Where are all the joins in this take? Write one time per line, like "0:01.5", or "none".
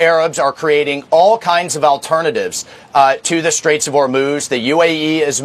0:03.2